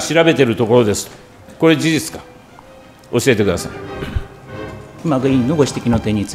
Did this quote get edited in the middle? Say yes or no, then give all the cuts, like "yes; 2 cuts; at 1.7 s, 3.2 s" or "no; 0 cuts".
yes; 2 cuts; at 1.4 s, 4.9 s